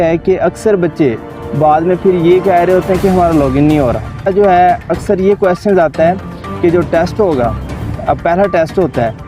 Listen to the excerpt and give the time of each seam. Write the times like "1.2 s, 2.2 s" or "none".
4.3 s